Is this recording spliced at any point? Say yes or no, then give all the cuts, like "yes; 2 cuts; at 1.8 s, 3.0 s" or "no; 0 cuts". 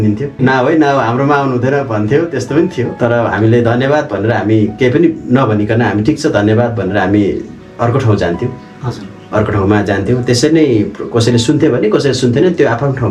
no; 0 cuts